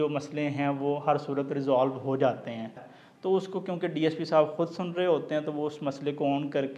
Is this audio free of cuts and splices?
no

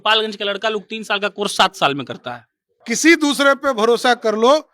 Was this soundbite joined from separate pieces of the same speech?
yes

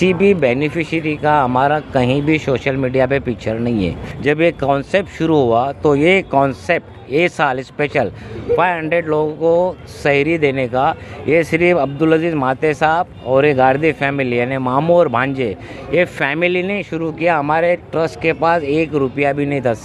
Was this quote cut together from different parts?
yes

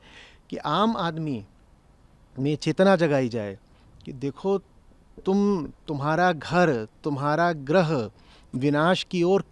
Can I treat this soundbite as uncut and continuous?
yes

